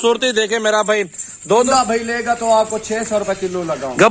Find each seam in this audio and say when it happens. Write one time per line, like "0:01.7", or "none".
0:01.7